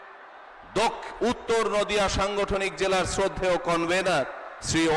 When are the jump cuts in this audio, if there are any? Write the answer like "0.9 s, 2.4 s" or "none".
none